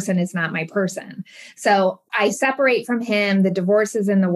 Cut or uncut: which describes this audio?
cut